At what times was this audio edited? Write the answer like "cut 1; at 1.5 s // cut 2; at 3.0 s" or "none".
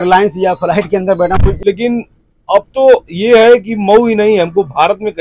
cut 1; at 1.6 s